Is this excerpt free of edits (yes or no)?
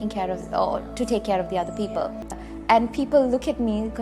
no